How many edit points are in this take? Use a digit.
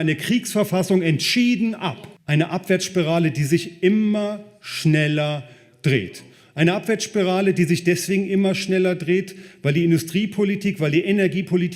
1